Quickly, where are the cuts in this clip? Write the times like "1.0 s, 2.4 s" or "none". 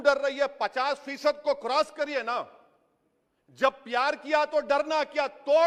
none